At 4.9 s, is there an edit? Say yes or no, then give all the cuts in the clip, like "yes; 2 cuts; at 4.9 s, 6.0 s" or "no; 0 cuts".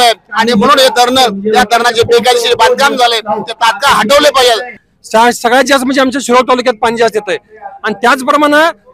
yes; 1 cut; at 4.9 s